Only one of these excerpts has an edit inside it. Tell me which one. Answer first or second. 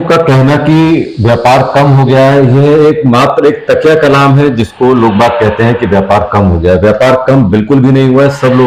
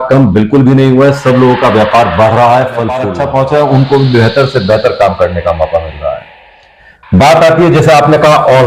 second